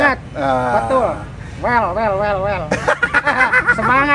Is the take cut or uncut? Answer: uncut